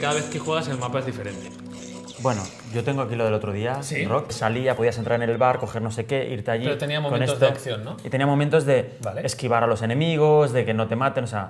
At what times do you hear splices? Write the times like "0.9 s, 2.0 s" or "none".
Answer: none